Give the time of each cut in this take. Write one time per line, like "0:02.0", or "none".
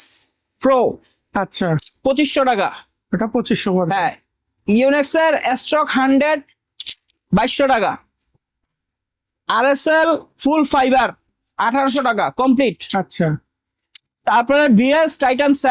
none